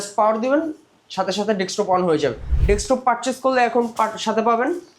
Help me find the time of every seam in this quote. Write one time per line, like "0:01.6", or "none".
0:02.5